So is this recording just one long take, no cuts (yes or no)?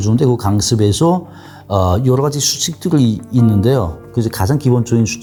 yes